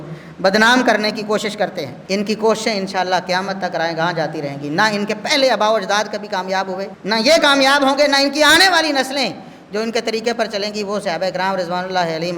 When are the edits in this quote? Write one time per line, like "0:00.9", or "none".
0:01.9
0:06.9